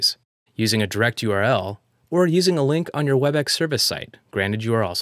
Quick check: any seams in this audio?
no; 0 cuts

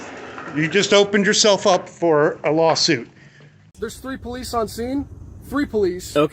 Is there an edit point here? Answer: yes; 1 cut; at 3.7 s

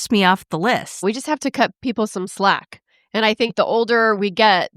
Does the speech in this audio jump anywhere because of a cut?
yes; 1 cut; at 1.0 s

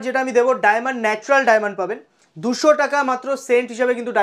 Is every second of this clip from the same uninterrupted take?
yes; 0 cuts

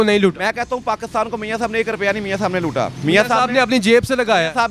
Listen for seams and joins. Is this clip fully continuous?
yes; 0 cuts

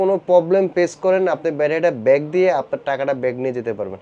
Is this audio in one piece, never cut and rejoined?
yes; 0 cuts

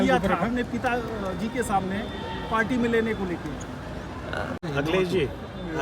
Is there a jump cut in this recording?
yes; 1 cut; at 4.6 s

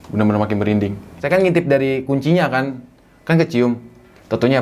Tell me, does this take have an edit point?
yes; 1 cut; at 1.1 s

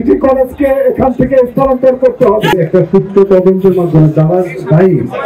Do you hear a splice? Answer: yes; 1 cut; at 2.5 s

